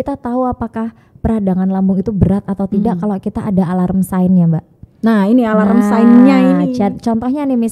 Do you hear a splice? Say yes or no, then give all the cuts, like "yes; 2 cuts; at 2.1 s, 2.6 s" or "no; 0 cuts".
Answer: no; 0 cuts